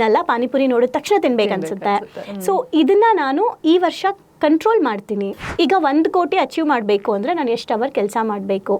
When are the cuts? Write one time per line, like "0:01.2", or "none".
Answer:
0:05.4

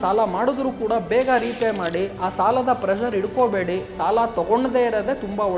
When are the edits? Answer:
none

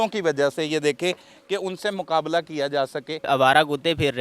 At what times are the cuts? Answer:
0:03.3

